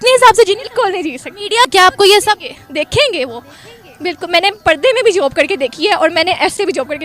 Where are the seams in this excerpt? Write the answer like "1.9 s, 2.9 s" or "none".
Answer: 1.7 s